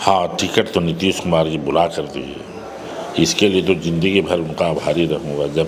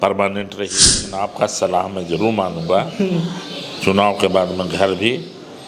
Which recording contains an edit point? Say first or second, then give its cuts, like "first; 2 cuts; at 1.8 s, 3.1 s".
second; 1 cut; at 1.0 s